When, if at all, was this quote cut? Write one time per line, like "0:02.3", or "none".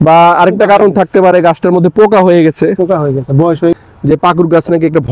0:03.8

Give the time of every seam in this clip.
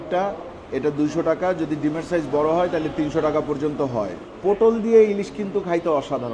0:04.2

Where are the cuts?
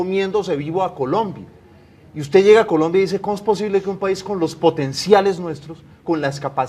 none

